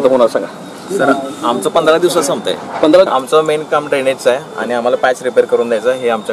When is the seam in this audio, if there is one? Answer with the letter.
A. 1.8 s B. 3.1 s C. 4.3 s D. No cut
B